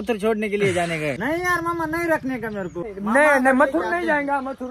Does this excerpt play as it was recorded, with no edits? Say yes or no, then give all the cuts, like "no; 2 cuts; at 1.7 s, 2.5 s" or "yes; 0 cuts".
no; 2 cuts; at 1.2 s, 2.9 s